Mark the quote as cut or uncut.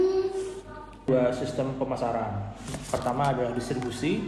cut